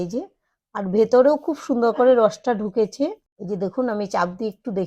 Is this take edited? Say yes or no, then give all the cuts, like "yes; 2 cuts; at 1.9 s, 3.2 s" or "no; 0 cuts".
yes; 1 cut; at 3.3 s